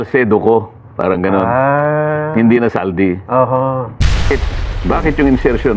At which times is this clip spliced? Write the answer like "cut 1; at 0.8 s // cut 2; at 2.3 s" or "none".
cut 1; at 4.3 s